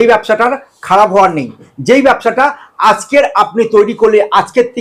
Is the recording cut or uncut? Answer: uncut